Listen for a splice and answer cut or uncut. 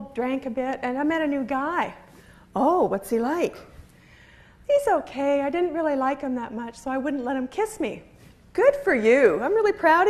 uncut